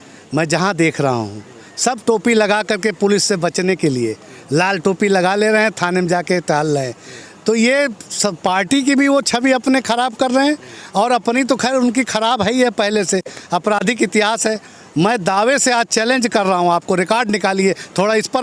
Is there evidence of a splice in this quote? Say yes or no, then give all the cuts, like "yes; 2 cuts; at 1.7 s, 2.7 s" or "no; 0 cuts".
no; 0 cuts